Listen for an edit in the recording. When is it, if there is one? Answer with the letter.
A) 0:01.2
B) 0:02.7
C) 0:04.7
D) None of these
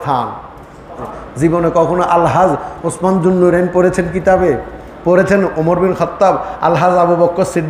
A